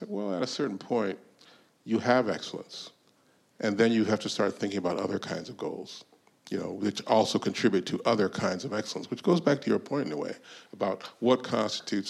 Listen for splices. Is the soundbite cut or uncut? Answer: uncut